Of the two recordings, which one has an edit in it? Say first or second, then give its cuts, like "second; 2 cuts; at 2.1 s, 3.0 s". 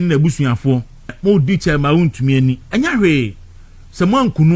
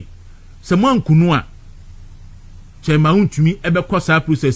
first; 1 cut; at 1.1 s